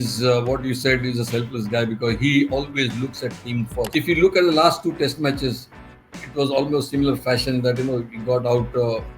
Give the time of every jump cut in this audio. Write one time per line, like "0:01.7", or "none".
0:03.8